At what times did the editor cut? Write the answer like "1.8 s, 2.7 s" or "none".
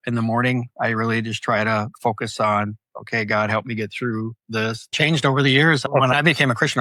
4.9 s